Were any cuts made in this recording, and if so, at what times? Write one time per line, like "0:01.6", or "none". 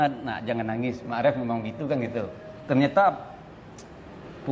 none

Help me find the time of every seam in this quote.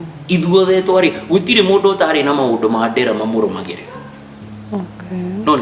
none

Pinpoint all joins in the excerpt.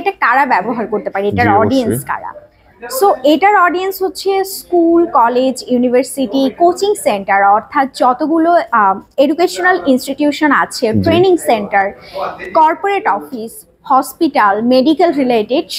none

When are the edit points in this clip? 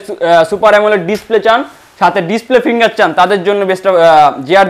none

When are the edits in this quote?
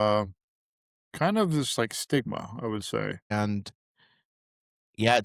0:03.3

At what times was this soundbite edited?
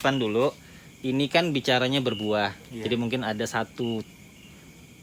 none

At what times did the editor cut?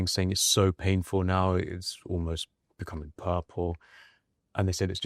none

